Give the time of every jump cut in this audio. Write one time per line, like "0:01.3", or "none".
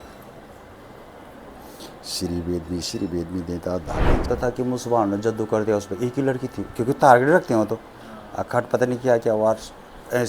0:04.3